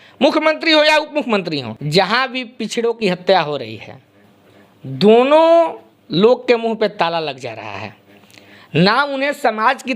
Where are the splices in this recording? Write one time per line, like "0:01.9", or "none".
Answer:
0:01.7